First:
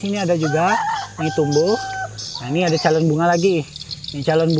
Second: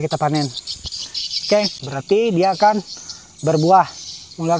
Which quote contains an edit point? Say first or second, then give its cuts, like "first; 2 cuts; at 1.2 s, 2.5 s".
second; 1 cut; at 1.8 s